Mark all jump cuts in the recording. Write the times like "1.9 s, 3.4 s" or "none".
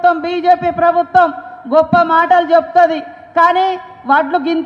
none